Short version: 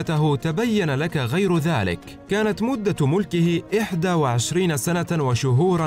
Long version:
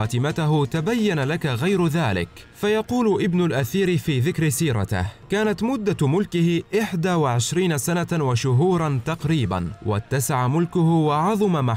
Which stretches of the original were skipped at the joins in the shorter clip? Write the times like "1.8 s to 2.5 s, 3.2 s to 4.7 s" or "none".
2.4 s to 5.1 s